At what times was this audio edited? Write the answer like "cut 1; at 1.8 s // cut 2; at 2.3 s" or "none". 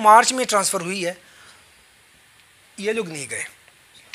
none

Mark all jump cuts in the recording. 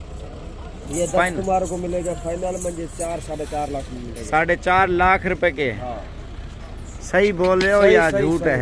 none

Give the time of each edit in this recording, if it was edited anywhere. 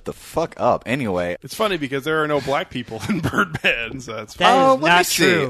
cut 1; at 1.4 s

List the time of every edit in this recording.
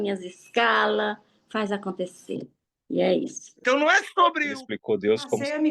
cut 1; at 3.5 s

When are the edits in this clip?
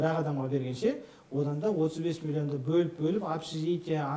none

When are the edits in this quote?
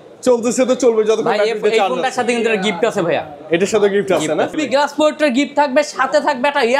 cut 1; at 4.6 s

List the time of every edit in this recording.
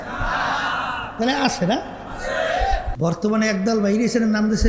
cut 1; at 2.9 s

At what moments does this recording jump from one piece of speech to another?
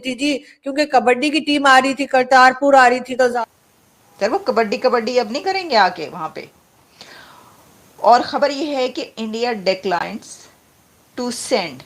cut 1; at 3.4 s

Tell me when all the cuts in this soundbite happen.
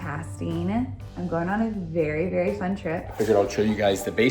cut 1; at 3.1 s

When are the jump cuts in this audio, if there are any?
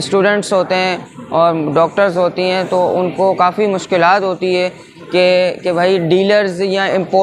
none

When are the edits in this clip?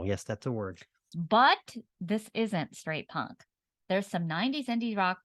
cut 1; at 1.1 s

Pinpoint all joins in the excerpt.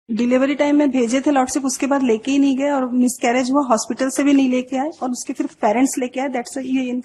none

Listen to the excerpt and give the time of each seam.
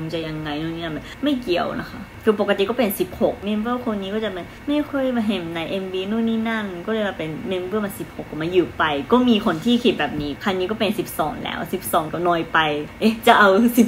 cut 1; at 1.1 s // cut 2; at 2.1 s // cut 3; at 3.4 s // cut 4; at 4.7 s // cut 5; at 10.3 s // cut 6; at 12.5 s

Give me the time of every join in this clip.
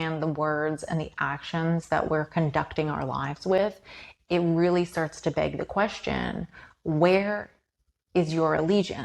none

